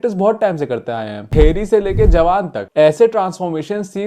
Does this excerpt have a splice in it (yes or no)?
yes